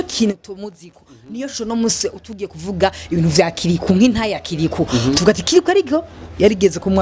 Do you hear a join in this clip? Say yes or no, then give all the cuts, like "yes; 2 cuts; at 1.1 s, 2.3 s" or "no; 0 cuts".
no; 0 cuts